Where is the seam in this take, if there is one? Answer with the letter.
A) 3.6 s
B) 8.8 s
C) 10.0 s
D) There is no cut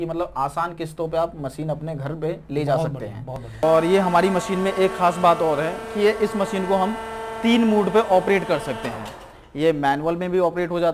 A